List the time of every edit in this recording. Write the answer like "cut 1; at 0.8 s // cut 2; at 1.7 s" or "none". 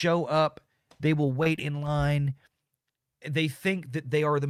none